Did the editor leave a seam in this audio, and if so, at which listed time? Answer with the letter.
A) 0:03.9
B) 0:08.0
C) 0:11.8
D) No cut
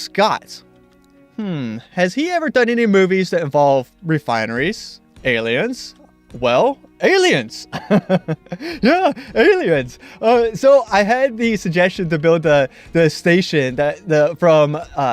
B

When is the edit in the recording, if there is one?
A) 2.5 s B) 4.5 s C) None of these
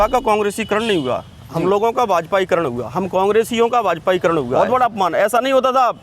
B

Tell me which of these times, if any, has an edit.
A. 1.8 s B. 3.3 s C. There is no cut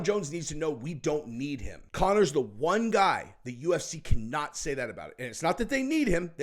A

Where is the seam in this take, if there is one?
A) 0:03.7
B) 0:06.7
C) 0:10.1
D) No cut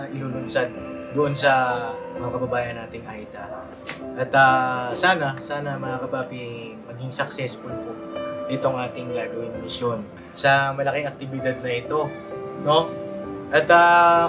C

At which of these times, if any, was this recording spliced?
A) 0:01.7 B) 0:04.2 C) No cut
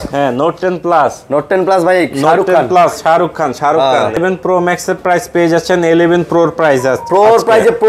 B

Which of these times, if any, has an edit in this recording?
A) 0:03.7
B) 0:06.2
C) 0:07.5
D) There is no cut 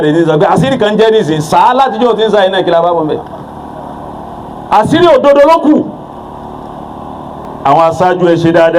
C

